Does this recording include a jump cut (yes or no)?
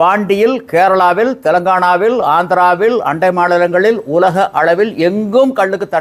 no